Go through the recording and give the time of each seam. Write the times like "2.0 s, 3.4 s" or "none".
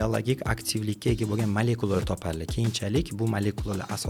none